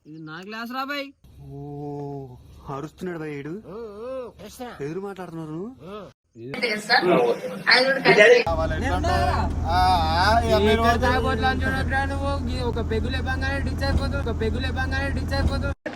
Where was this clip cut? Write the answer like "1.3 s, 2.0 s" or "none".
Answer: 6.6 s

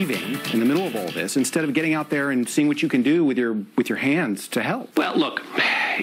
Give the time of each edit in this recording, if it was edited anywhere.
5.0 s

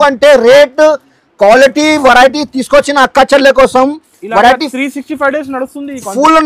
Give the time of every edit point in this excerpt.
none

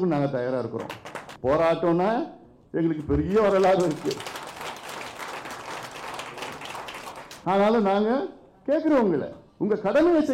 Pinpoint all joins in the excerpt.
1.3 s

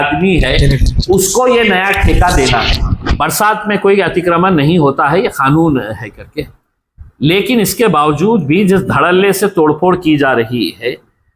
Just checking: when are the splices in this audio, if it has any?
3.0 s

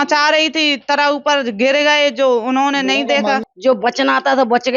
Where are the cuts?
3.4 s

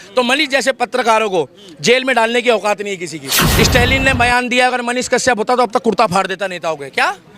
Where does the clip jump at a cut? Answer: 3.4 s

